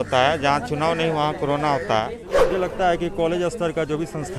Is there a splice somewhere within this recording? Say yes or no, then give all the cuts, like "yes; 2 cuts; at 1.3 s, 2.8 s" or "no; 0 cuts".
yes; 1 cut; at 2.2 s